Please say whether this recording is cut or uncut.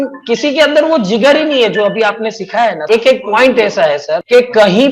cut